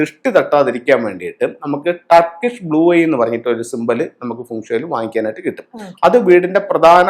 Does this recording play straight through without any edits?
yes; 0 cuts

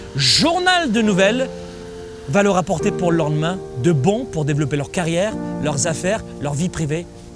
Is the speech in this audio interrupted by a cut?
no; 0 cuts

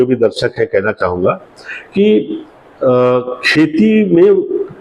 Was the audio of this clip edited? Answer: no; 0 cuts

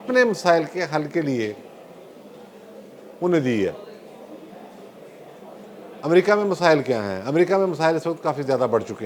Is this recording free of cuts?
yes; 0 cuts

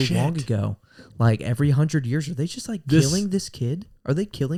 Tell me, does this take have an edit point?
no; 0 cuts

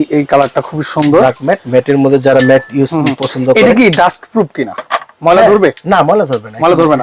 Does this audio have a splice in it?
no; 0 cuts

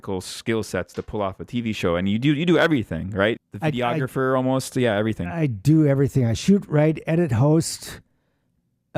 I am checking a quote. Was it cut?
yes; 1 cut; at 3.5 s

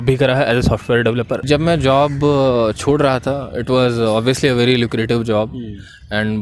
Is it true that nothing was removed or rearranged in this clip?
no; 1 cut; at 1.4 s

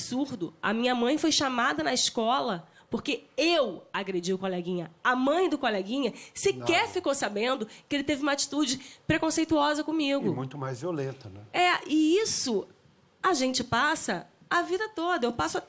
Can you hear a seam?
yes; 1 cut; at 14.7 s

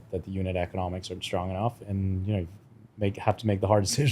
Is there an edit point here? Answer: yes; 1 cut; at 1.8 s

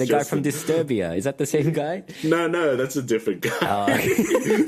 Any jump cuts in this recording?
no; 0 cuts

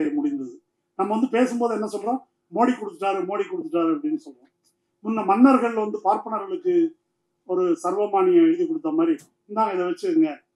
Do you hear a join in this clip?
no; 0 cuts

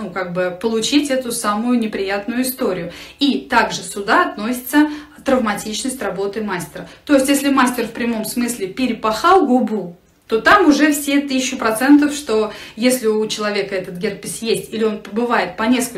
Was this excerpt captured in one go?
yes; 0 cuts

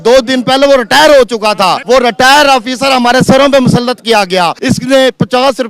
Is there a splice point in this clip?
yes; 2 cuts; at 1.8 s, 4.6 s

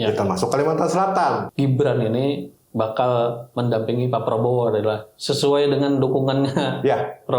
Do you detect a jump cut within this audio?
yes; 1 cut; at 1.5 s

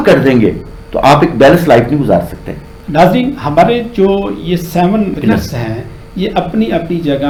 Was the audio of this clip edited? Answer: no; 0 cuts

